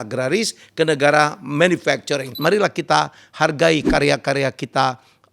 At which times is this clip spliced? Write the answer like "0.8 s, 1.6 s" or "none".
2.4 s

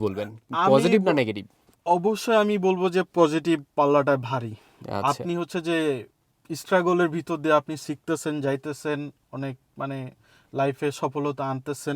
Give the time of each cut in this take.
none

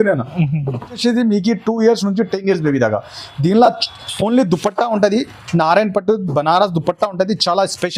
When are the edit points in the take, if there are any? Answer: 1.0 s

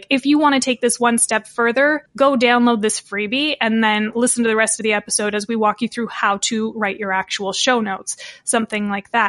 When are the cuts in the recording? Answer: none

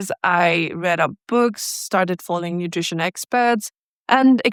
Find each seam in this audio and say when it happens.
none

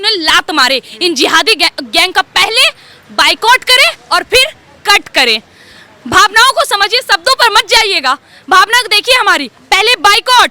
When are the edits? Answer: none

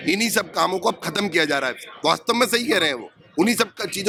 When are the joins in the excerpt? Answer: none

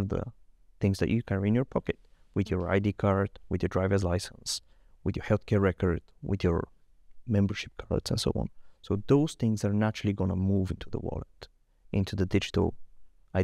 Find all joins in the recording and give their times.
none

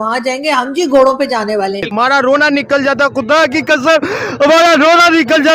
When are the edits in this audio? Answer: 1.9 s

